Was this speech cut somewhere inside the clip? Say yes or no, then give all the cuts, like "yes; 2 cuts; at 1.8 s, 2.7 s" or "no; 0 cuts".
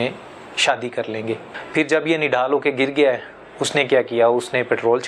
yes; 1 cut; at 1.5 s